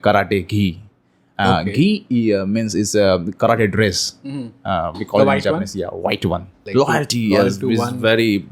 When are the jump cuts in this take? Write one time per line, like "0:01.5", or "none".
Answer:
0:06.5